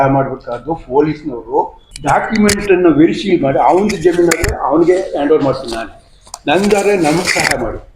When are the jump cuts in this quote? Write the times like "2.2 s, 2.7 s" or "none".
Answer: 1.8 s